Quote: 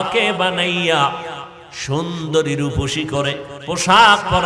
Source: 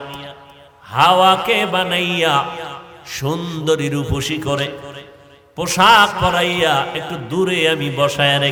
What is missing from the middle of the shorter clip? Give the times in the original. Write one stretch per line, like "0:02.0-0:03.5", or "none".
0:04.8-0:05.4